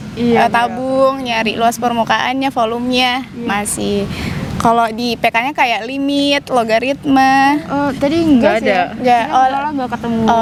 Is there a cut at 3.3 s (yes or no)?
no